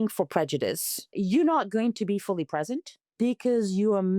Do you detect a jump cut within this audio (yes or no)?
yes